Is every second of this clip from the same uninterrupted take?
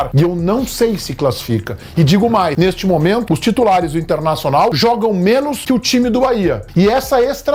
yes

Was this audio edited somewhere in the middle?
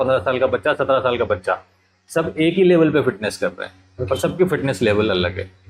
no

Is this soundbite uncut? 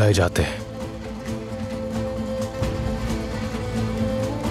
yes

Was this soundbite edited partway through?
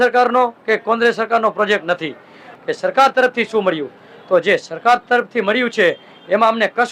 yes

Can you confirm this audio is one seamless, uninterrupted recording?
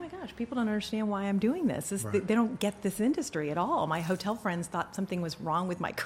yes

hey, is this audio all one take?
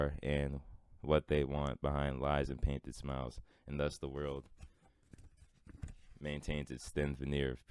yes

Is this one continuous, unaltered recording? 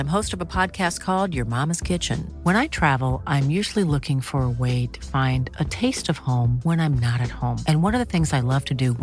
yes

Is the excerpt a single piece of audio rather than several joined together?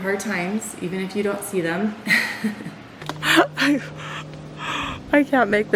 no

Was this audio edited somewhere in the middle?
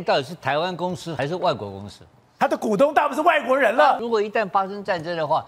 yes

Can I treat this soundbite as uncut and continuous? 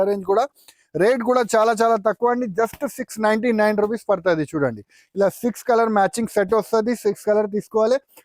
yes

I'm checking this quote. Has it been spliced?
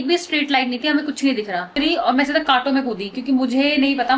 yes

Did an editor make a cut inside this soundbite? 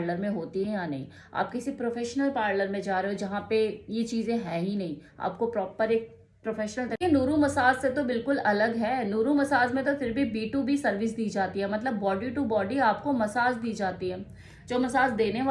yes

